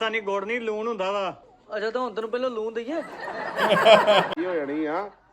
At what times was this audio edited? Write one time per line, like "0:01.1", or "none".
0:04.3